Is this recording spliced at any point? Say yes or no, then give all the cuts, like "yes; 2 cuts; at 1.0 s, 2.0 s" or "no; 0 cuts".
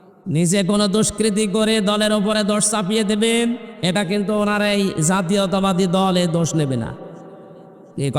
no; 0 cuts